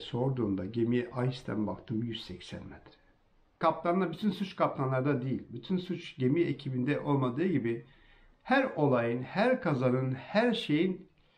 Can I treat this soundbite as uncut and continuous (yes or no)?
no